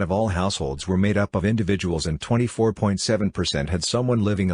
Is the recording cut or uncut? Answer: cut